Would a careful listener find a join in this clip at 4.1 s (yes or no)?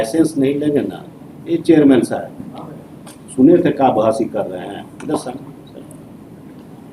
no